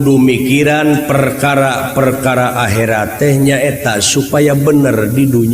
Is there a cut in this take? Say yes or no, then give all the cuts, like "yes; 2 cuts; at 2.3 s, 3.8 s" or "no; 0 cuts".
no; 0 cuts